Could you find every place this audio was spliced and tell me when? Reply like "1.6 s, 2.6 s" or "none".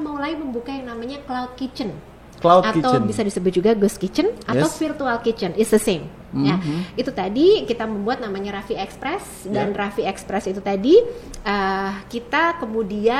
none